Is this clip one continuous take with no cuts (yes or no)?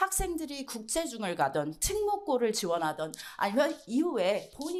yes